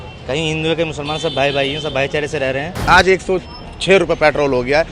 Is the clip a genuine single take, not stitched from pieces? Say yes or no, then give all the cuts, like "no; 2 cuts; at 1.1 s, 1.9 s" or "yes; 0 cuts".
no; 1 cut; at 2.8 s